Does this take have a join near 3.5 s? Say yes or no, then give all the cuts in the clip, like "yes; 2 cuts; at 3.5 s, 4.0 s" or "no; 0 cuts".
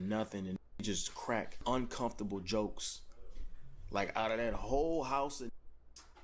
no; 1 cut; at 1.5 s